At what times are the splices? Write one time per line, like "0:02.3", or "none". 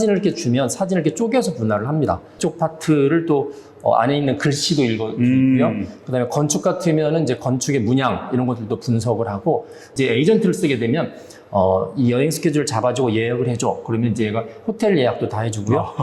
0:02.4
0:09.9

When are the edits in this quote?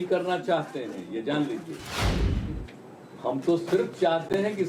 none

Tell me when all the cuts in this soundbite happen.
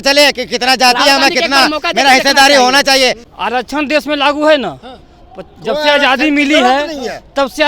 0:03.2

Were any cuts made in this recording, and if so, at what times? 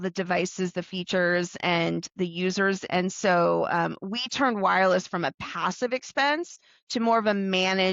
0:02.8

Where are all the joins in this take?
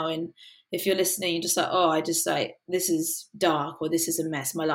none

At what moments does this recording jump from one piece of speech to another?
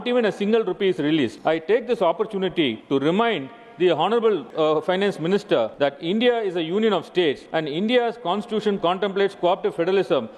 0:01.3
0:02.8
0:04.5
0:05.7
0:07.4

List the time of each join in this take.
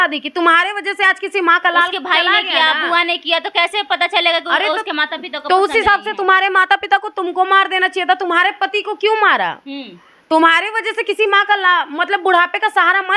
none

